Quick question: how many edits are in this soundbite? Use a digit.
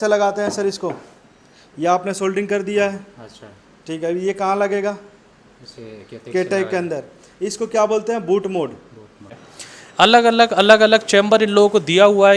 1